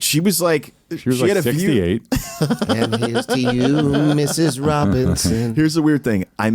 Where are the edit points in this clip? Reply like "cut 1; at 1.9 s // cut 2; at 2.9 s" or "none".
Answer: none